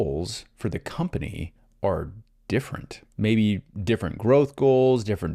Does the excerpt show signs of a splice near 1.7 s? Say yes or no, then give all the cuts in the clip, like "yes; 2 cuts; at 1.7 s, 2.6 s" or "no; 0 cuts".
no; 1 cut; at 3.1 s